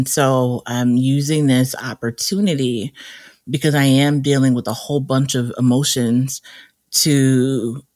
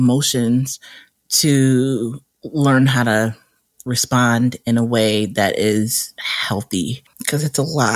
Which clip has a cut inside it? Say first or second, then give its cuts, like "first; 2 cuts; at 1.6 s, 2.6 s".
second; 1 cut; at 6.9 s